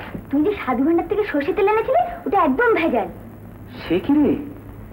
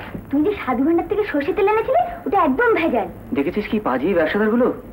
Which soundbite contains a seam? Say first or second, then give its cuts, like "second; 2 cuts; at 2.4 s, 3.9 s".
second; 1 cut; at 3.2 s